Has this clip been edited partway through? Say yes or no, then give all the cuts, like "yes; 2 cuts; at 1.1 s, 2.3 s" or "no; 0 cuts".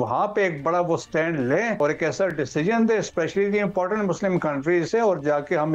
yes; 1 cut; at 1.8 s